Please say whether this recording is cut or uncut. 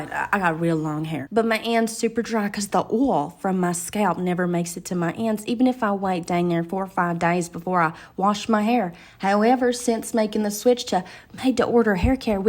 cut